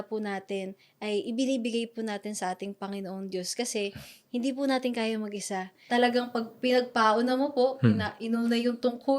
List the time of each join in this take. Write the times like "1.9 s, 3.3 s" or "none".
5.8 s